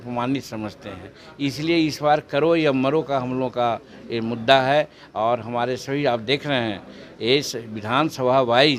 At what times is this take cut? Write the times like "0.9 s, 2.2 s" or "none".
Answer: none